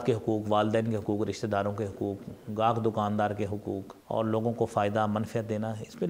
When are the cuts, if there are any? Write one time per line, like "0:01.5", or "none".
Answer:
0:03.9